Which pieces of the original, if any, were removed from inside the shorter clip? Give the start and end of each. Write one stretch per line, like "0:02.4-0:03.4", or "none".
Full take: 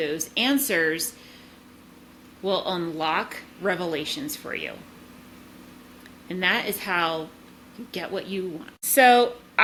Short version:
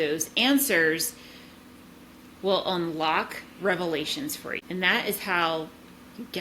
0:04.6-0:06.2